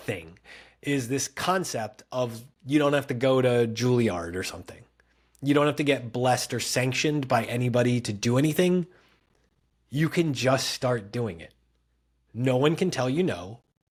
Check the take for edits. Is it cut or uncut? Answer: uncut